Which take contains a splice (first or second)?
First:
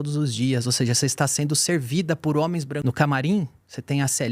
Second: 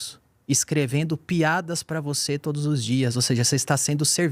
first